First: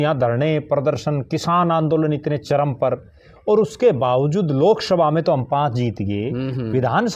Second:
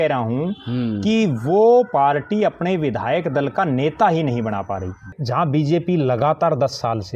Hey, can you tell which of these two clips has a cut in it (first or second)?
second